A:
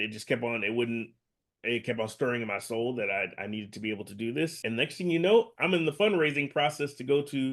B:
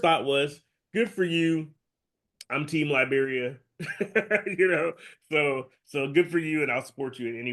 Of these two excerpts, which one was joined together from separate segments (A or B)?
A